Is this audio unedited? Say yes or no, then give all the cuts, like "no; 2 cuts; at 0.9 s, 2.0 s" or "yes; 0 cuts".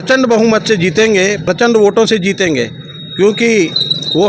no; 1 cut; at 1.4 s